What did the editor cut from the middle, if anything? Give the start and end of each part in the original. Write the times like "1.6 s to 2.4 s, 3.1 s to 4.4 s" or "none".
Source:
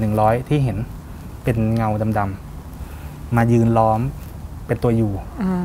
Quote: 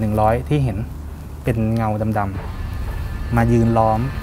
none